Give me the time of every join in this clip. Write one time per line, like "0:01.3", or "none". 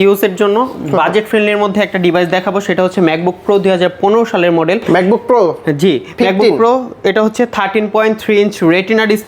none